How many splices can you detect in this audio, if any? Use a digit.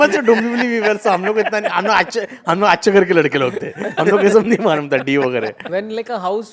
1